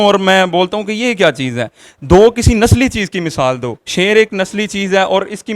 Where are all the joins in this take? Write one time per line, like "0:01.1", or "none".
none